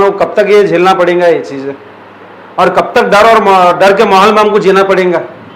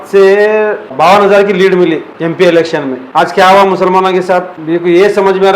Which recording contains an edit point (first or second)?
second